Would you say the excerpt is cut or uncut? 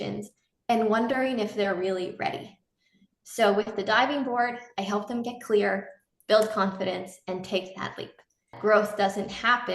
cut